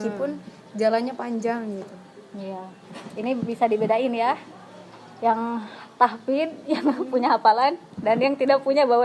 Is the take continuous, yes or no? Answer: no